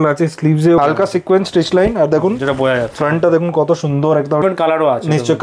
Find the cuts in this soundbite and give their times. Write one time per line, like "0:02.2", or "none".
0:00.8
0:04.4